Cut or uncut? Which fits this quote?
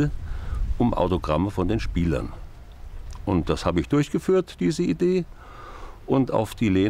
uncut